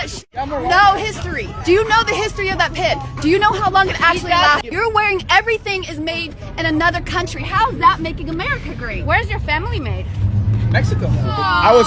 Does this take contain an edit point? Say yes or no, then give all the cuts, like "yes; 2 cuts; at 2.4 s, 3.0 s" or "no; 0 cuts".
yes; 1 cut; at 4.6 s